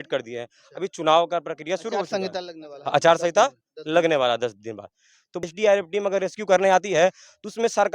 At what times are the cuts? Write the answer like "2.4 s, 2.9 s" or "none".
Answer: 5.4 s